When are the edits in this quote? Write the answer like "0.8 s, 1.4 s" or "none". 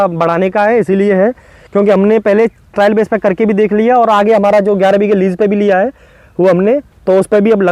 none